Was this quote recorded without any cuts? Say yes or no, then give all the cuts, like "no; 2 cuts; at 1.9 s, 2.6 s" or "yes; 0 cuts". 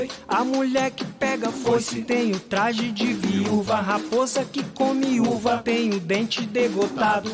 yes; 0 cuts